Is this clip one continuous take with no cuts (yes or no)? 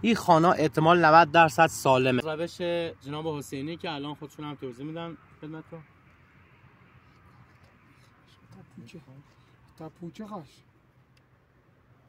no